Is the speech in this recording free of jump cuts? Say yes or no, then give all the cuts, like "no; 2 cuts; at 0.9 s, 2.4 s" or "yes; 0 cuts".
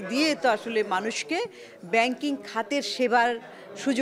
yes; 0 cuts